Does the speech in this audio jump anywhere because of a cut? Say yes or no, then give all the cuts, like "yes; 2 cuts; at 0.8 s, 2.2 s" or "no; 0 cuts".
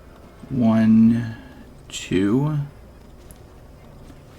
yes; 1 cut; at 3.0 s